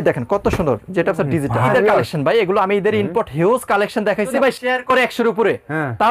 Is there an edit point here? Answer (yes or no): yes